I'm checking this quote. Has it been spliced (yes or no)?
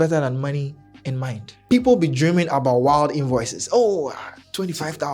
yes